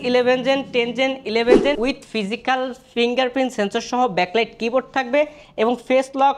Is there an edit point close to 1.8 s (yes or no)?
yes